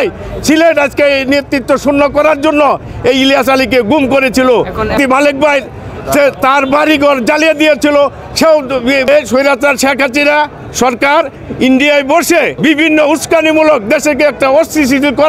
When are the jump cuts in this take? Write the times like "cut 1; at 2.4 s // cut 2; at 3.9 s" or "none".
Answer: cut 1; at 4.9 s // cut 2; at 9.3 s // cut 3; at 12.5 s